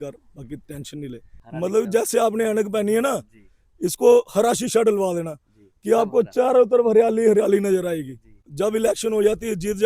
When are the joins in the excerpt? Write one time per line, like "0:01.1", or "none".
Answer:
0:01.3
0:08.5